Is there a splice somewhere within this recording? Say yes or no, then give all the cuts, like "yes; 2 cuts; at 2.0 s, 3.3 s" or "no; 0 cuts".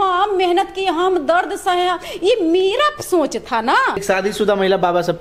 yes; 1 cut; at 4.0 s